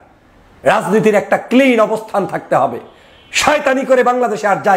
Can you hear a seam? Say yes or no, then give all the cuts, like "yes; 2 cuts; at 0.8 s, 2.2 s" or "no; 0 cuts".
no; 0 cuts